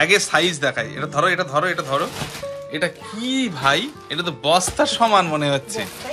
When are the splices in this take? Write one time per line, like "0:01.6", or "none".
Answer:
none